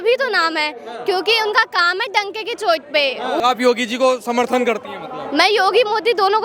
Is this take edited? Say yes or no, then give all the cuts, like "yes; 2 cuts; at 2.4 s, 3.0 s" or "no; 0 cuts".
yes; 1 cut; at 3.4 s